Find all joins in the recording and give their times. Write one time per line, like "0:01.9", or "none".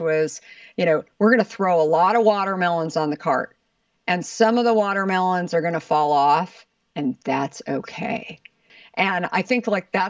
0:08.6